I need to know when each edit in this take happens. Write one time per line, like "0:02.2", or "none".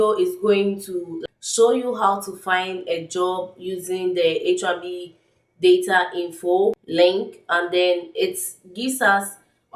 0:01.1
0:06.8